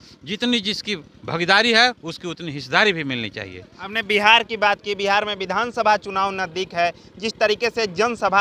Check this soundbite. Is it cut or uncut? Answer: uncut